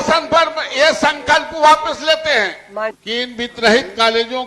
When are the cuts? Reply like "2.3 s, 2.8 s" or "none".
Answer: 2.9 s